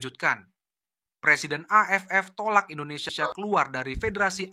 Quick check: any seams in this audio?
yes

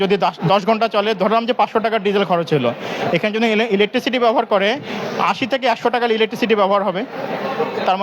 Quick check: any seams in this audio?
no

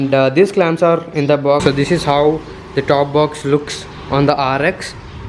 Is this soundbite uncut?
no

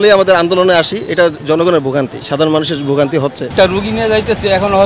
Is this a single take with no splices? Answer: no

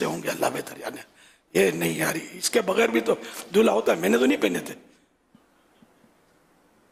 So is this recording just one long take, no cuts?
yes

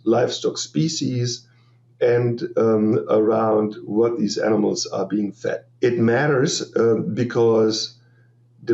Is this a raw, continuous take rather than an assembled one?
no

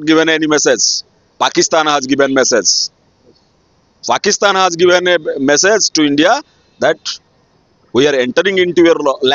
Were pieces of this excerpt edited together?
no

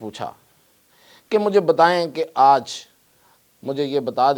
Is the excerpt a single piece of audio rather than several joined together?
yes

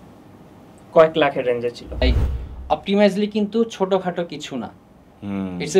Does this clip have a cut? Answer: yes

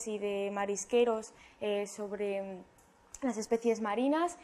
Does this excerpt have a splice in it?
yes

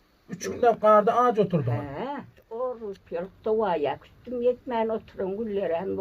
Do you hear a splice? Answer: yes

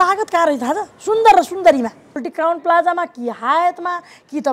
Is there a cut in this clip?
yes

